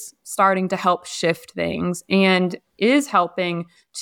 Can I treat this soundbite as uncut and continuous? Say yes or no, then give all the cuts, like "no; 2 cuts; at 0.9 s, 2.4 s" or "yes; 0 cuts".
yes; 0 cuts